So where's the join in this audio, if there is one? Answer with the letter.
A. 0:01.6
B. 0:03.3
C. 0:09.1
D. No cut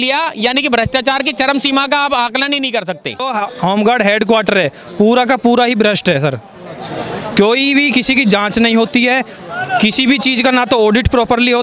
B